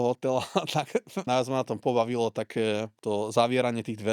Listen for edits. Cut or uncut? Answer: cut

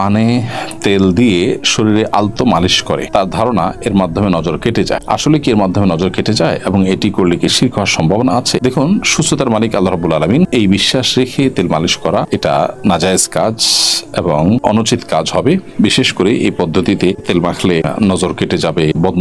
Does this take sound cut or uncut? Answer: uncut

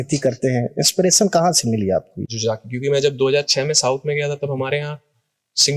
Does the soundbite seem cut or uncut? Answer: cut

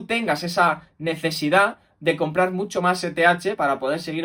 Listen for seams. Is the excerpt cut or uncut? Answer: uncut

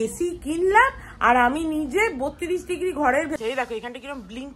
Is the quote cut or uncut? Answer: cut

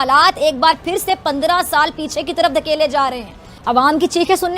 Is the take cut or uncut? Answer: cut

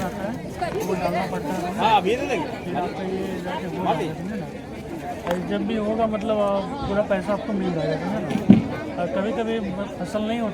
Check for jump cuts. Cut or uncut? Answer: uncut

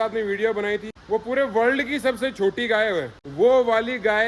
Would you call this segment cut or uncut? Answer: cut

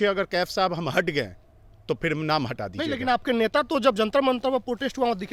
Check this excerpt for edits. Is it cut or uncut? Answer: uncut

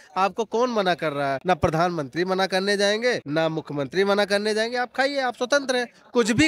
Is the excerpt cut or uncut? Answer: cut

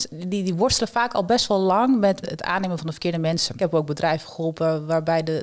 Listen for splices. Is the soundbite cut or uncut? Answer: cut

